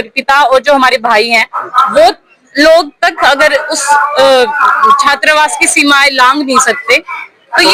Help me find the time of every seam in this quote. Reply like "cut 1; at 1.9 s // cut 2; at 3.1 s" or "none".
none